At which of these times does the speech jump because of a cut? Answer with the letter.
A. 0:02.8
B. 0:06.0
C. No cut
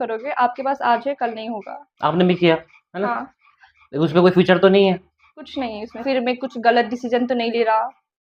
B